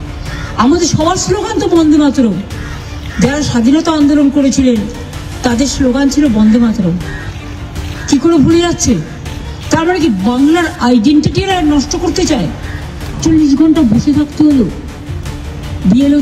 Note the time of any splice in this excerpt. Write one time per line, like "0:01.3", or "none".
0:13.2